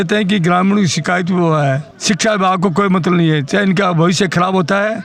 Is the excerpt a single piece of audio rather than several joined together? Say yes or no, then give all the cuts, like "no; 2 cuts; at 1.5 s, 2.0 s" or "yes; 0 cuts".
no; 1 cut; at 1.9 s